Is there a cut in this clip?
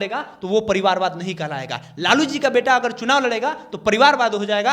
no; 0 cuts

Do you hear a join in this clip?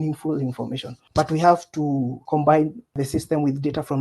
yes; 2 cuts; at 2.2 s, 2.9 s

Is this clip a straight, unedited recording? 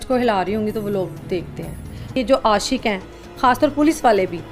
no; 1 cut; at 2.1 s

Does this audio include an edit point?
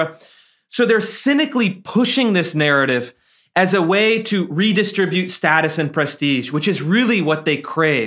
no; 0 cuts

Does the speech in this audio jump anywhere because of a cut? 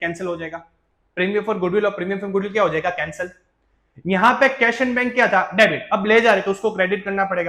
no; 0 cuts

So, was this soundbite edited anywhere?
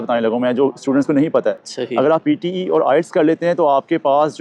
no; 0 cuts

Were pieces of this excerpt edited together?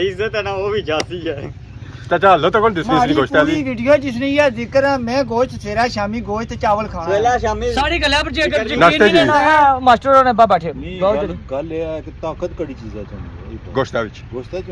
no; 0 cuts

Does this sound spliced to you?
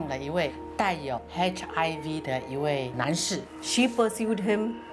yes; 2 cuts; at 1.0 s, 3.2 s

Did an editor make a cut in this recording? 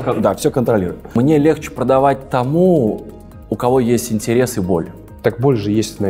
yes; 2 cuts; at 1.2 s, 5.0 s

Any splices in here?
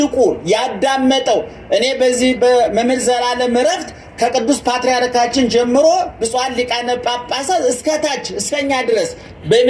no; 0 cuts

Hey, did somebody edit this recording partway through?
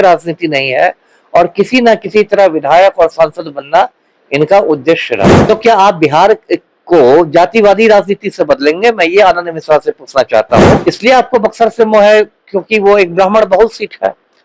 yes; 2 cuts; at 5.4 s, 10.8 s

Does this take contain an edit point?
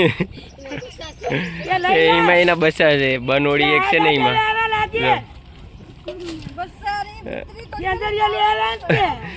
no; 0 cuts

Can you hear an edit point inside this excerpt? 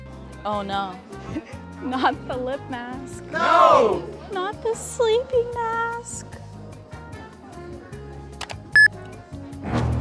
no; 0 cuts

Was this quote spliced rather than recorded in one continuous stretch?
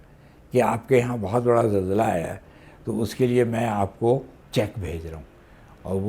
yes; 1 cut; at 4.4 s

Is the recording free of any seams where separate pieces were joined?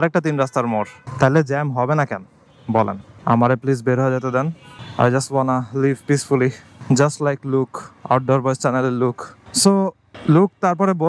yes; 0 cuts

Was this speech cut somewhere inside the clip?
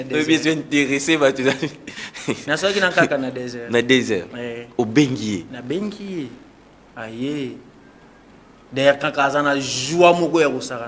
no; 0 cuts

